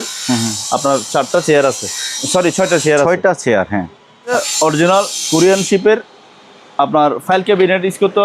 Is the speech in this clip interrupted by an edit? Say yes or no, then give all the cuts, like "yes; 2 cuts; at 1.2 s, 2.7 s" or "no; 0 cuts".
yes; 1 cut; at 4.3 s